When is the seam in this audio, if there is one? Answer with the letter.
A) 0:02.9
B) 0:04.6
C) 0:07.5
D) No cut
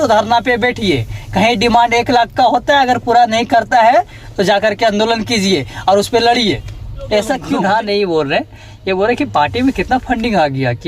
C